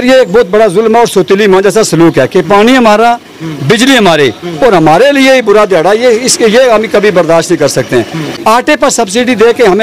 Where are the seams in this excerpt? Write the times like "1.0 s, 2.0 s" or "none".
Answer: 8.2 s